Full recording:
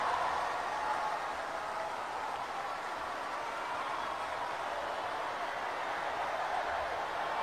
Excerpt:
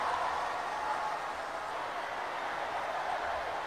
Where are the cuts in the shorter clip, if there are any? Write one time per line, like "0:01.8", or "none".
0:01.7